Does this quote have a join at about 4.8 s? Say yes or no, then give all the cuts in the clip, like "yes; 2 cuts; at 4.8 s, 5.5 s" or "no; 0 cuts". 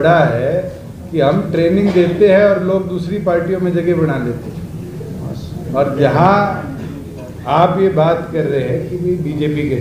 no; 0 cuts